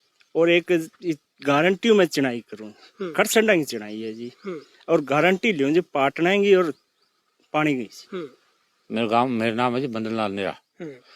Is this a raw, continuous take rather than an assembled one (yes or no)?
no